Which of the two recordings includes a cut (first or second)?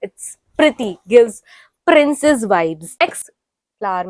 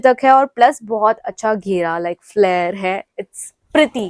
first